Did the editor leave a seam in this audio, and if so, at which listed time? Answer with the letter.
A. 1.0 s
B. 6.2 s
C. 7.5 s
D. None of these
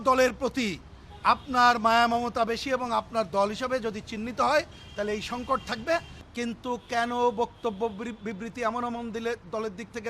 B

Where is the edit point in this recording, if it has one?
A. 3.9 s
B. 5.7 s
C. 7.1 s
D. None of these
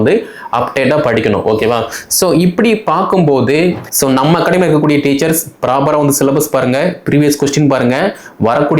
A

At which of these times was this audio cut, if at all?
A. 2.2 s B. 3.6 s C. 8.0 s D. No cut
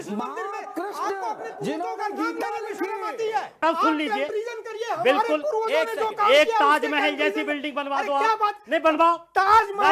B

